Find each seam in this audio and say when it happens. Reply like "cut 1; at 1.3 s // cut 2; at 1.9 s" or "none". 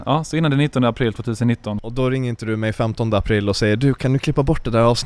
cut 1; at 1.8 s

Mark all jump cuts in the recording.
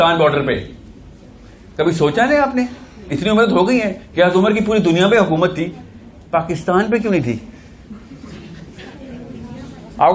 none

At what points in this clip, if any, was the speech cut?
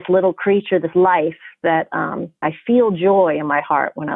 cut 1; at 2.4 s

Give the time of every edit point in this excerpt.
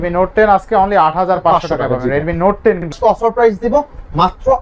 cut 1; at 3.0 s

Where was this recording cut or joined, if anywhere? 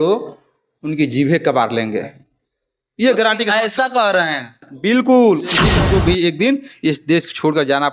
cut 1; at 5.6 s

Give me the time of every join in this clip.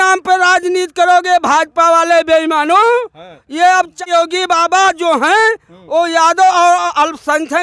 cut 1; at 4.0 s

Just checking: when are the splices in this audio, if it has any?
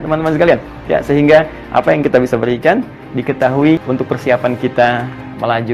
none

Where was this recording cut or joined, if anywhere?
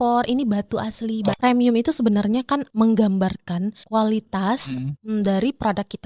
cut 1; at 1.4 s // cut 2; at 2.7 s // cut 3; at 3.8 s // cut 4; at 4.9 s

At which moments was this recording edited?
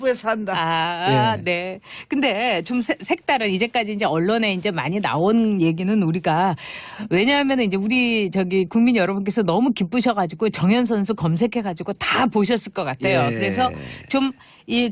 cut 1; at 1.4 s

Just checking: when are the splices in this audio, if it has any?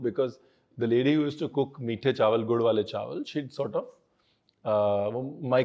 none

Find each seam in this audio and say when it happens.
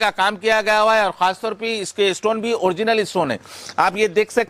none

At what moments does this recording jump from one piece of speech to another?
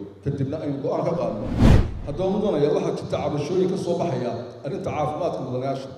cut 1; at 1.6 s

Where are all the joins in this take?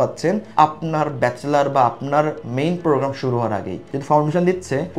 cut 1; at 3.9 s

